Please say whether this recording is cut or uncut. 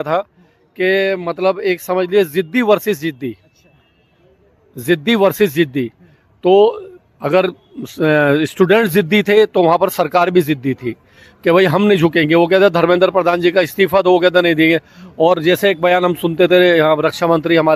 uncut